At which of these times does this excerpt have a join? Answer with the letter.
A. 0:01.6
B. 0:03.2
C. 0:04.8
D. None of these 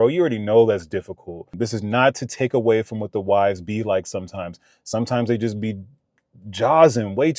A